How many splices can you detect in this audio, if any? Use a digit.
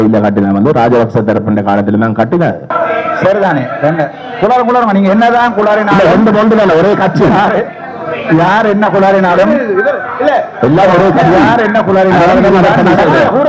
1